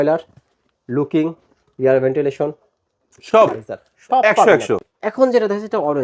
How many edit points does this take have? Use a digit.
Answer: 1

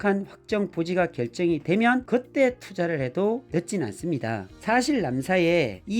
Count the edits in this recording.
1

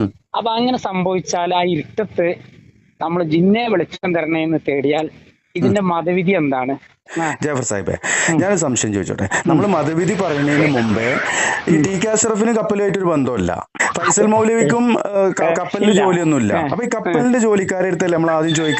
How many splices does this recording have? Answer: 2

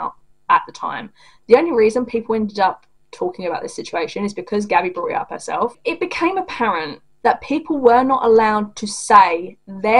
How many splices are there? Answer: 2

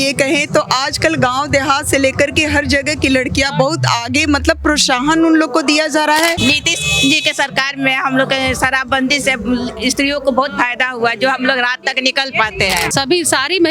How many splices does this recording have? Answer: 2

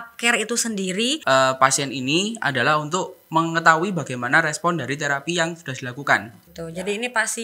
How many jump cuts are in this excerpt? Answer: 2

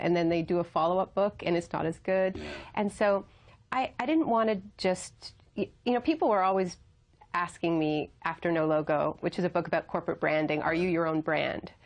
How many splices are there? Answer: 1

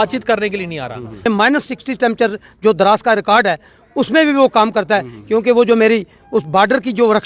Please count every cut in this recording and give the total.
1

